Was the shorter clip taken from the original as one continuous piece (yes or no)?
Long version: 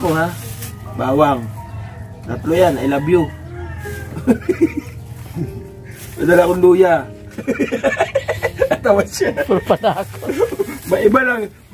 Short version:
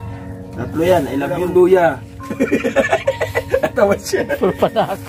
no